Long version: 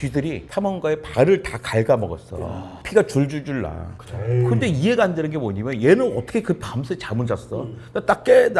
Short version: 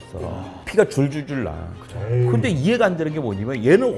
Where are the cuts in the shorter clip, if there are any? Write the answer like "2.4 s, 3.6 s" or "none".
none